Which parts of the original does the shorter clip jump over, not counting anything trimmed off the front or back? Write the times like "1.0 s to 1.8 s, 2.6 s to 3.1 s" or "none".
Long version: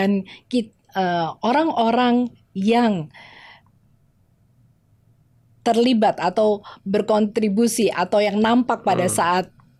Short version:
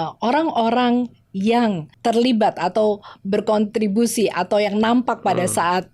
3.1 s to 5.5 s